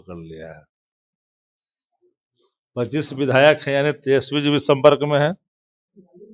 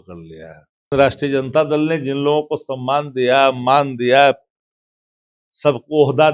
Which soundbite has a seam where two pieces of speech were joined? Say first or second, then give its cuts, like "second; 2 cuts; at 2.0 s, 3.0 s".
second; 1 cut; at 0.9 s